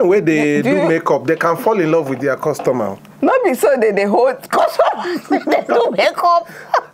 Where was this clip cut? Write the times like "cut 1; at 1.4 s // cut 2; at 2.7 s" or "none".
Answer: none